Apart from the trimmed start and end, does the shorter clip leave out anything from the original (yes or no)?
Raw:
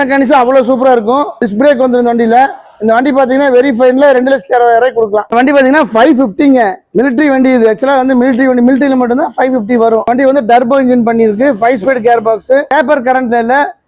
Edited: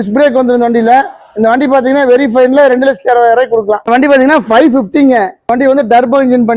yes